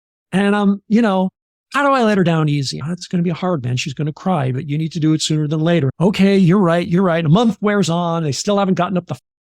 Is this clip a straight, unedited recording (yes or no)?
no